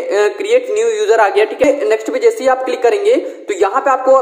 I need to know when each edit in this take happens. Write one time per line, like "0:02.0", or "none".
0:01.6